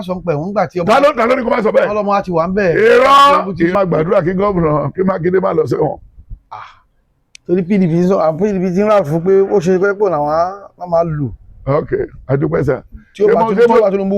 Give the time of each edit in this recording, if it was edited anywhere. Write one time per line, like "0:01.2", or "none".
0:03.7